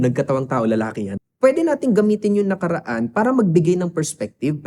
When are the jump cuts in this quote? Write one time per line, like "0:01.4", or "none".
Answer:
0:01.2